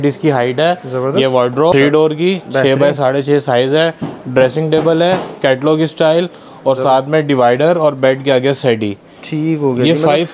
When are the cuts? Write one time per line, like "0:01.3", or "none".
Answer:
0:01.7